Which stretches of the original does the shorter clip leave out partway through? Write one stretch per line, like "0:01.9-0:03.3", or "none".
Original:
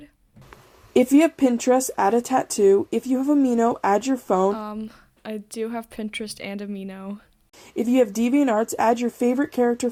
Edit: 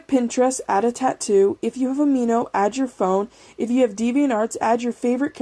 0:04.7-0:07.6